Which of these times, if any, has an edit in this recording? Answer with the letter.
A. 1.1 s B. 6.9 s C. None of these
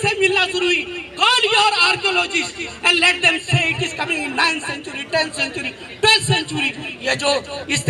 B